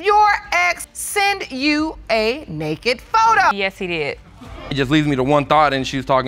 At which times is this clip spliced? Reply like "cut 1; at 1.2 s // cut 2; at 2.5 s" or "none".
cut 1; at 4.7 s